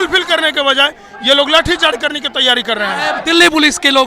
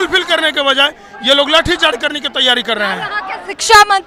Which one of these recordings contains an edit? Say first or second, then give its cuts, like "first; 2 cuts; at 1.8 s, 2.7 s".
first; 1 cut; at 3.1 s